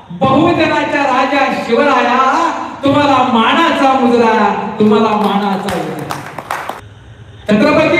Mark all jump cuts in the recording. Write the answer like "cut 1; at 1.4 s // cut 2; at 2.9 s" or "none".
cut 1; at 6.8 s